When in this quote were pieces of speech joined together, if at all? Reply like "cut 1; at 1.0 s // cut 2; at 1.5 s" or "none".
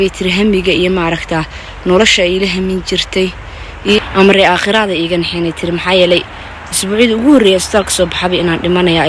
cut 1; at 4.0 s

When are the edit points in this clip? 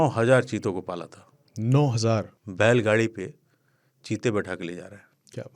cut 1; at 2.4 s

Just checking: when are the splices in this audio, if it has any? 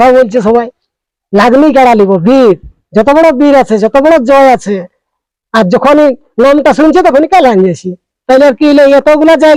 none

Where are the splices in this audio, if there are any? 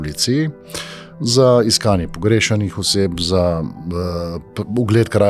none

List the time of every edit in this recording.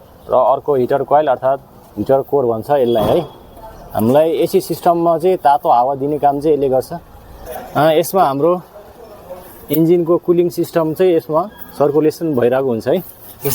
none

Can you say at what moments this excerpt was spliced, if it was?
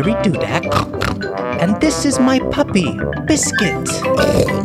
none

